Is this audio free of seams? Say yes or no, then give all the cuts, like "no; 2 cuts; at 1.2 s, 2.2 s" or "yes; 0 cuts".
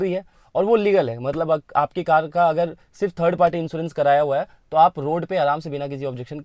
yes; 0 cuts